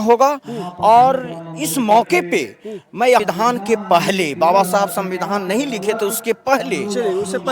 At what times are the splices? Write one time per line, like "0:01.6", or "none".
0:03.2